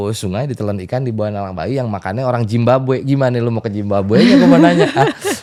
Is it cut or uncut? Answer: uncut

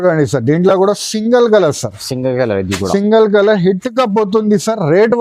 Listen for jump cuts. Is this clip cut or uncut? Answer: uncut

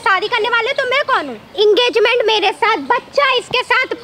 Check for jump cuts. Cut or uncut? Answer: cut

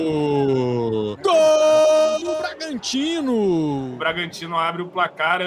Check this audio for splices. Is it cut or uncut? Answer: cut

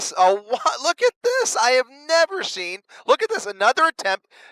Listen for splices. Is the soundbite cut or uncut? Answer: cut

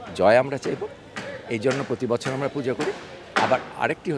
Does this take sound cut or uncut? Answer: uncut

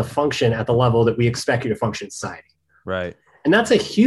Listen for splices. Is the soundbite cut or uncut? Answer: uncut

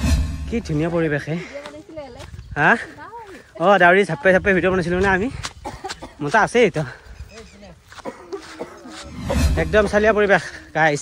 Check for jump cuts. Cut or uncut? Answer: cut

